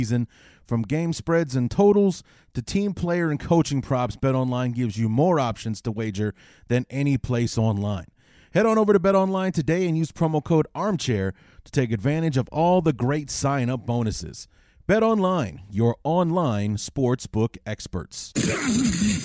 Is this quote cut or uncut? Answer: cut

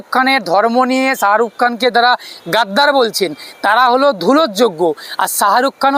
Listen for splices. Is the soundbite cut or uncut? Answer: uncut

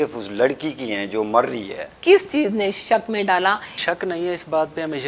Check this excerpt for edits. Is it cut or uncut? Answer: cut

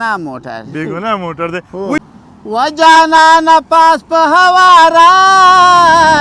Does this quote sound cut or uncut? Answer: cut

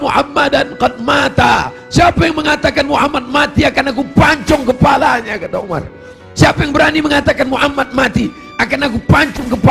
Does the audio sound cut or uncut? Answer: uncut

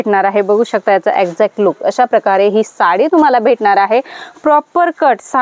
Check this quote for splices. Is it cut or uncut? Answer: uncut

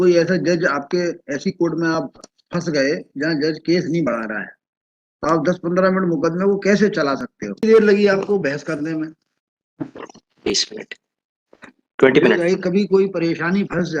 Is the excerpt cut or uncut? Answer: cut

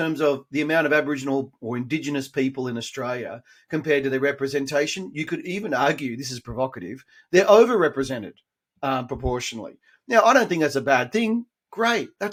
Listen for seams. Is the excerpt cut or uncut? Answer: uncut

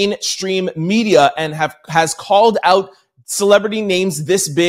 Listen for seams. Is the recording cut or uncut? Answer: uncut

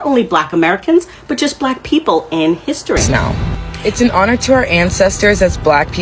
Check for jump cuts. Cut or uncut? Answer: cut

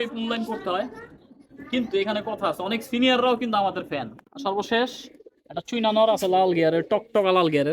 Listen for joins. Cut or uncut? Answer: cut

